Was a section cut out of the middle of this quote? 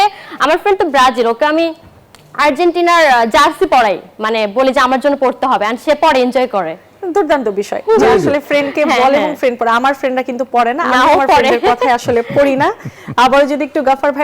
no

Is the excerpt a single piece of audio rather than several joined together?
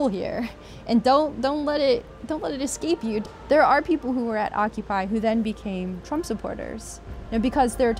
no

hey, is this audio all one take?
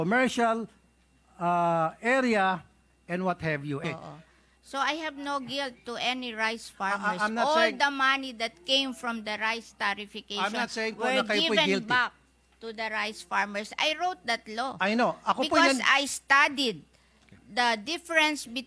no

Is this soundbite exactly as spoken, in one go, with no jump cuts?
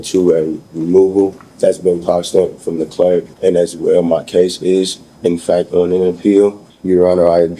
no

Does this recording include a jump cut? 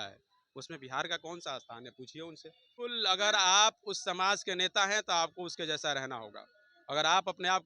yes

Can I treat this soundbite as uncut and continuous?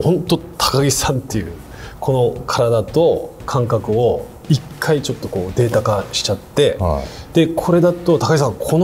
yes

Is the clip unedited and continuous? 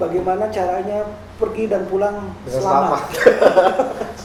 yes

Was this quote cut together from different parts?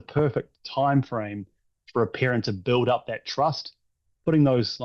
no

